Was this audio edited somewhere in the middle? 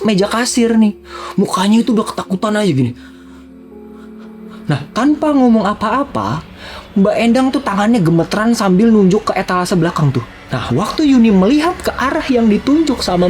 no; 0 cuts

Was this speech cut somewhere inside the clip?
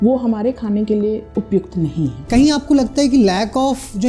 yes; 2 cuts; at 1.3 s, 2.3 s

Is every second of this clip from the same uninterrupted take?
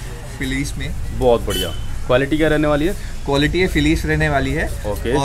yes; 0 cuts

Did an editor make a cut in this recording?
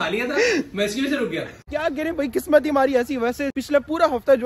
yes; 2 cuts; at 1.7 s, 3.5 s

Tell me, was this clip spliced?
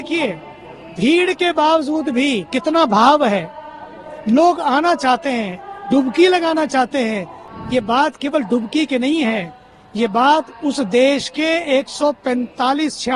yes; 1 cut; at 7.4 s

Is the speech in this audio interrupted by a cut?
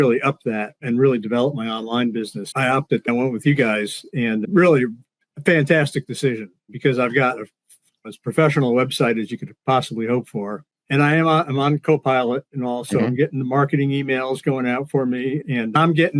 no; 0 cuts

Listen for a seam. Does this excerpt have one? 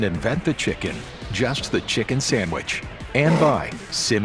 yes; 1 cut; at 3.1 s

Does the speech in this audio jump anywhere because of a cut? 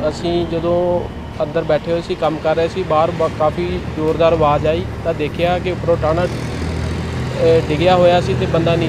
no; 0 cuts

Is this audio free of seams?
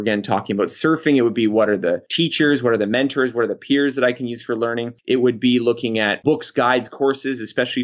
no; 2 cuts; at 4.9 s, 6.2 s

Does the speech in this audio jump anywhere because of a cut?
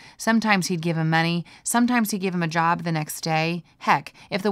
no; 0 cuts

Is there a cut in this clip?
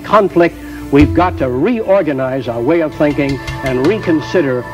no; 0 cuts

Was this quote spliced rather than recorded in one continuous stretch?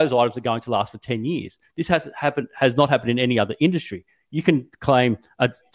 no; 0 cuts

